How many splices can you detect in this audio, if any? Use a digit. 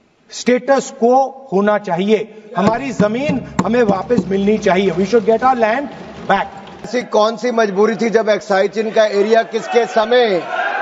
1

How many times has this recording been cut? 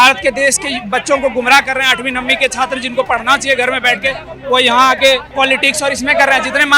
1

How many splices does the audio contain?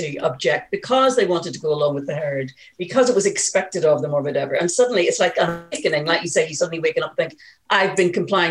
0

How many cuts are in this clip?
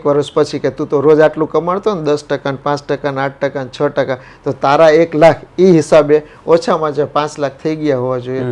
0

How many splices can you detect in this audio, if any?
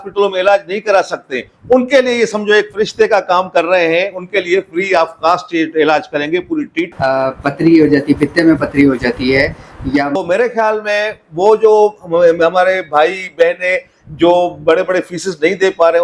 2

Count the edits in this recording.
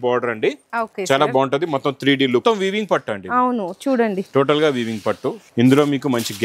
2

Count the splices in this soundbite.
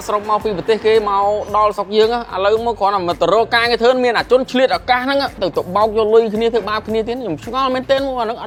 0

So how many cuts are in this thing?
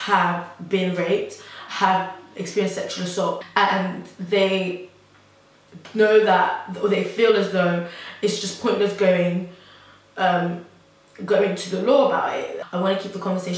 2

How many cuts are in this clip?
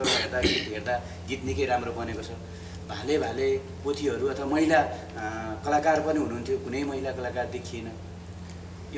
0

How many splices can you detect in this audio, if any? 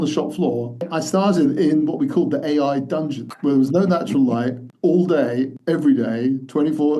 4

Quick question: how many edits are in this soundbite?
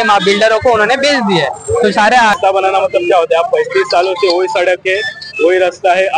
1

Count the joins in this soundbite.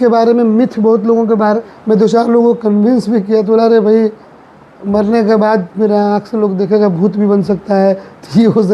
1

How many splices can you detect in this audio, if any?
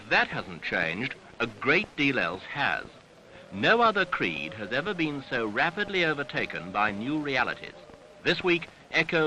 1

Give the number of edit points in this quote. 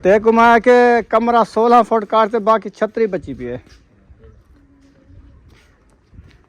1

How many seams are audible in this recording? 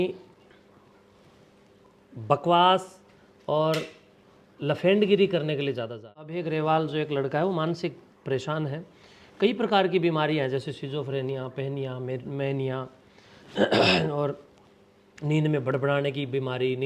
1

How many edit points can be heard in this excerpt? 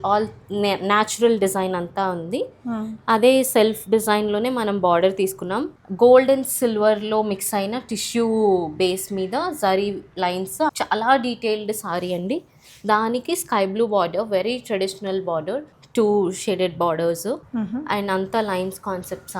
4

